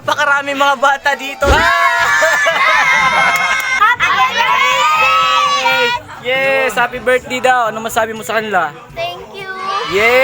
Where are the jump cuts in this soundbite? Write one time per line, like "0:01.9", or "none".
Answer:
0:01.5
0:03.7